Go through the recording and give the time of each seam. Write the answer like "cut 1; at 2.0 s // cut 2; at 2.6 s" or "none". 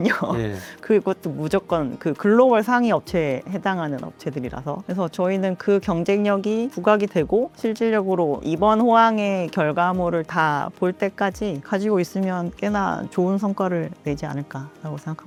none